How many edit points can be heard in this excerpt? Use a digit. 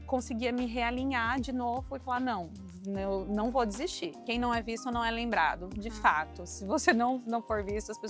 1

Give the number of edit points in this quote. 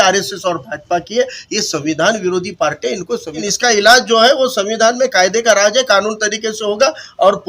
1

